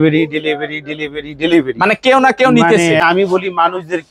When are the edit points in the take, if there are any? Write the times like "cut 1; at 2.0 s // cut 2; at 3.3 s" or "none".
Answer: cut 1; at 3.0 s